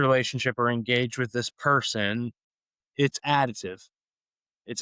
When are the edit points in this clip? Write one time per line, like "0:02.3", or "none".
0:02.5